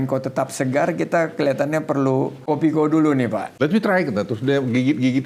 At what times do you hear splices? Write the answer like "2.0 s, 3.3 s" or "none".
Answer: 2.4 s, 3.4 s